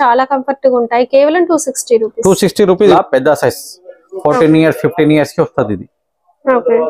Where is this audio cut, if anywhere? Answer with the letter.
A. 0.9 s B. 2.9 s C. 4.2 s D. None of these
B